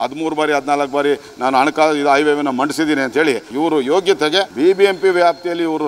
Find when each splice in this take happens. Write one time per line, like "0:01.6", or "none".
0:03.5
0:04.5